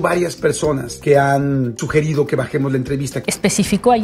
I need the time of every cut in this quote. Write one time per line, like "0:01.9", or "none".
0:01.8
0:03.2